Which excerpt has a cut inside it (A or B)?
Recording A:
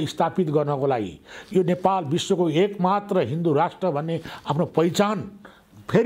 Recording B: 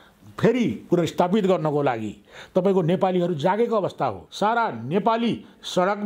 B